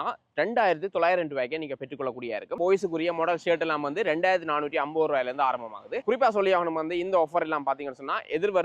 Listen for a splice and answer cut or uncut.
cut